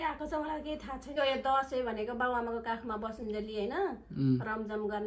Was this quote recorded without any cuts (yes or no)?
no